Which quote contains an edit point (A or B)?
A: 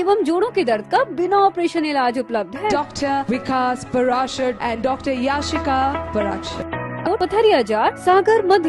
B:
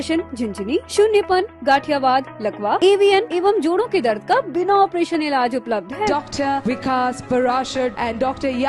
A